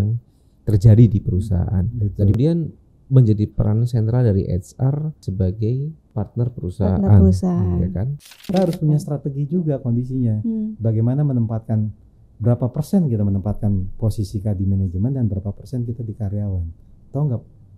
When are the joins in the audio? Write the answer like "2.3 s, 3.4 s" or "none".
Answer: 2.4 s, 5.2 s, 6.0 s, 8.5 s